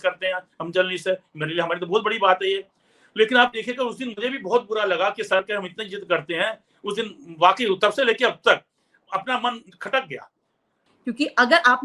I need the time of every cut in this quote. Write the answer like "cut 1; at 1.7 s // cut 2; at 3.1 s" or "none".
cut 1; at 10.8 s